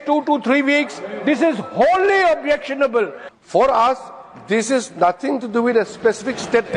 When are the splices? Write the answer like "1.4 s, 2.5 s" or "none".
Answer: 3.2 s